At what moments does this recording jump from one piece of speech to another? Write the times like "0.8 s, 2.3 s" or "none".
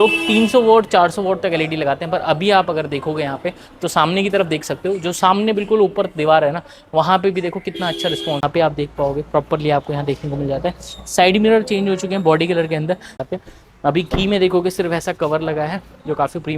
8.4 s, 13.1 s